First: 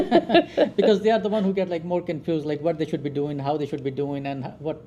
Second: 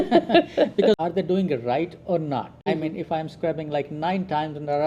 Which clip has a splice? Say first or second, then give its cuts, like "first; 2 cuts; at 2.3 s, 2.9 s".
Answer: second; 2 cuts; at 1.0 s, 2.7 s